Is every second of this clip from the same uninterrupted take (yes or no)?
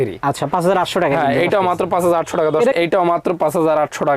no